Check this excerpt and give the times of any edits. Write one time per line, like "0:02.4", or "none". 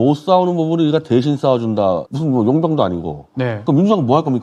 none